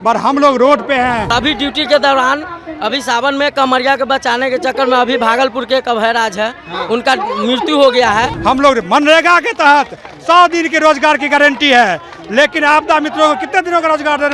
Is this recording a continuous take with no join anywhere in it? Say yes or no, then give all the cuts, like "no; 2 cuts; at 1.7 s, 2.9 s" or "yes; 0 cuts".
no; 2 cuts; at 1.3 s, 8.3 s